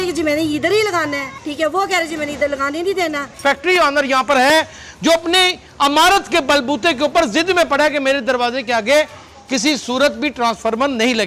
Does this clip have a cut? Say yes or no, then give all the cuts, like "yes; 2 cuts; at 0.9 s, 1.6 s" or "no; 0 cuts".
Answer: yes; 2 cuts; at 1.4 s, 3.4 s